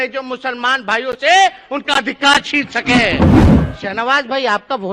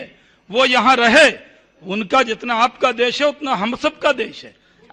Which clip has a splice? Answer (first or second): first